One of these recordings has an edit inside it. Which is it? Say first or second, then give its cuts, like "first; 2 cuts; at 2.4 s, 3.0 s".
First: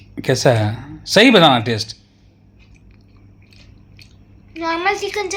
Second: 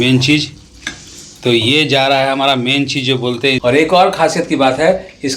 second; 1 cut; at 3.6 s